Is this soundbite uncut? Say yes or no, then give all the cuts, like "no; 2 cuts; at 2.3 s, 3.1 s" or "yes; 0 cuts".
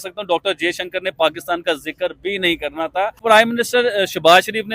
no; 1 cut; at 3.2 s